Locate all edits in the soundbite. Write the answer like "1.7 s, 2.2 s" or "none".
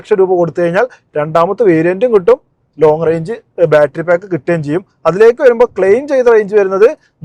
none